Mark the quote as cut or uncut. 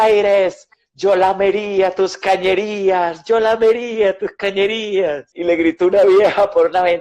cut